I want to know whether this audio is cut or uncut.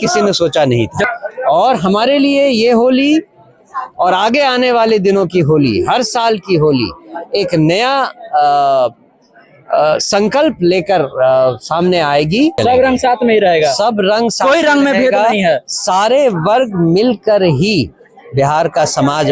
cut